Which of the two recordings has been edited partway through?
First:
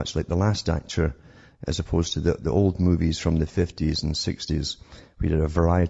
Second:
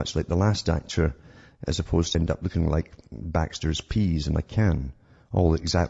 first; 1 cut; at 2.1 s

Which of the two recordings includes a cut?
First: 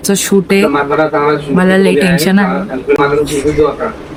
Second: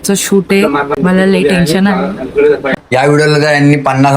second; 2 cuts; at 0.9 s, 2.5 s

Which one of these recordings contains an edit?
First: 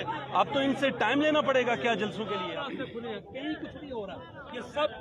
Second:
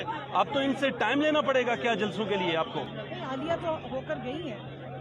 first; 1 cut; at 2.4 s

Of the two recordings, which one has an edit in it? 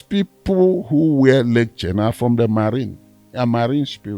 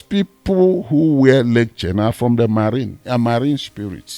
second; 1 cut; at 3.0 s

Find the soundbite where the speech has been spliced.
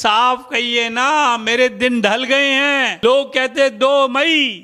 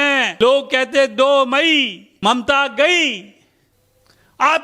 second; 1 cut; at 3.4 s

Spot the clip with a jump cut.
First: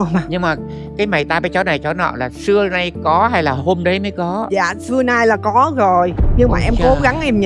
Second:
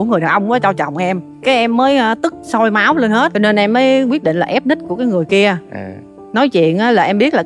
second; 2 cuts; at 1.3 s, 3.3 s

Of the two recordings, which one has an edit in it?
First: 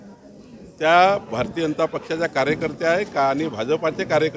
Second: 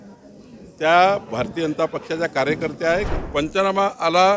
second; 1 cut; at 3.1 s

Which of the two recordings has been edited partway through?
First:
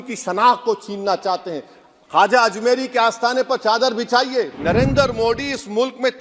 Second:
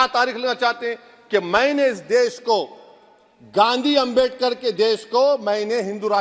first; 1 cut; at 4.5 s

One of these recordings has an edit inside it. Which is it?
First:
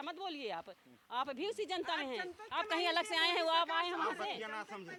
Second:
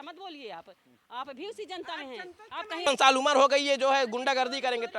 second; 1 cut; at 2.9 s

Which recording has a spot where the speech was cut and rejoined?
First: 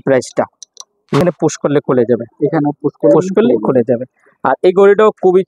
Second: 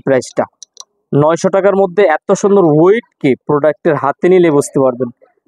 first; 1 cut; at 1.2 s

